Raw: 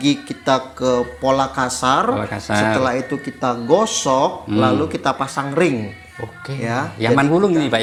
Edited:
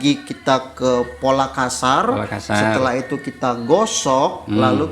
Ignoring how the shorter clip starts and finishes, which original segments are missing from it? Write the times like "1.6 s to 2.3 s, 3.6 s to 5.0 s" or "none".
none

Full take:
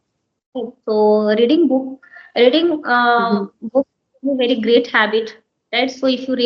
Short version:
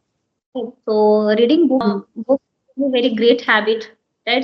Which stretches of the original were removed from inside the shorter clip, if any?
1.8 s to 3.3 s

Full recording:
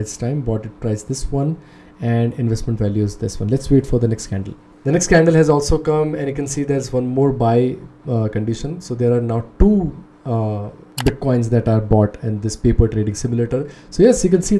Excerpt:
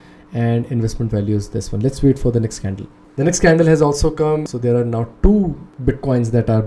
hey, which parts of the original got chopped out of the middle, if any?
6.2 s to 8.8 s, 10.0 s to 10.8 s

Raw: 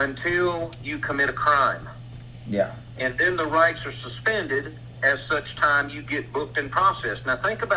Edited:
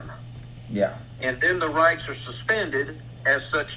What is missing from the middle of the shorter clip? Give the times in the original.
none

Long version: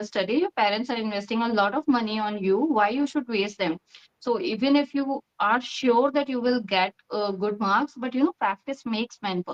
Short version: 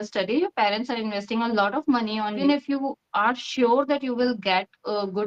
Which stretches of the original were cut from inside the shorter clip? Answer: 2.4 s to 4.6 s

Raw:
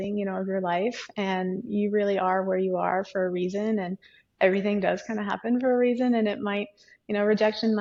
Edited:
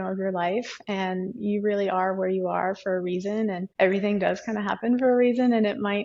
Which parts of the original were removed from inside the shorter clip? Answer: 3.9 s to 4.3 s

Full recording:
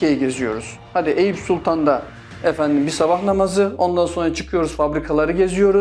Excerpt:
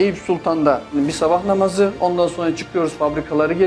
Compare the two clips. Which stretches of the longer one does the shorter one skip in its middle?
2.1 s to 2.7 s

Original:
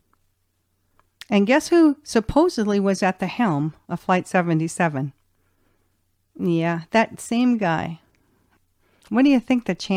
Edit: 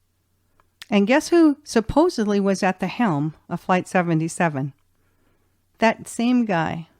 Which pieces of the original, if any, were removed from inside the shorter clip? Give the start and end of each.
6.1 s to 6.8 s

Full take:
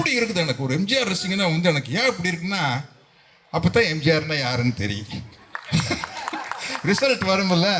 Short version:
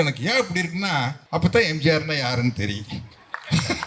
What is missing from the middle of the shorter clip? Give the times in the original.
2.9 s to 3.4 s

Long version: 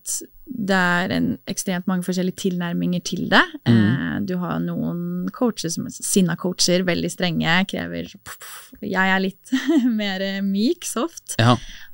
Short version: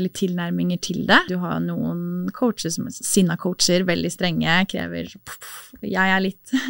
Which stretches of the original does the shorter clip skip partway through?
3.5 s to 4.3 s

